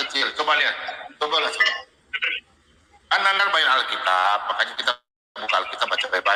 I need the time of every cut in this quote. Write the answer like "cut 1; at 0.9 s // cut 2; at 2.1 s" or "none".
none